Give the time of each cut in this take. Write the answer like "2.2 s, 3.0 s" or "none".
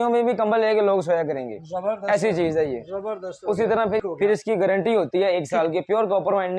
4.0 s